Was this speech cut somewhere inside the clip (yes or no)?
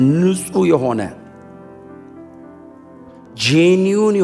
yes